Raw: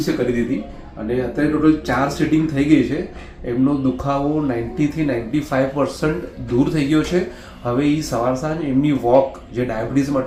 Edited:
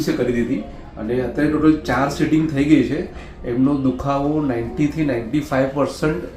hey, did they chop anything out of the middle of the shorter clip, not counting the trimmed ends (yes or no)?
no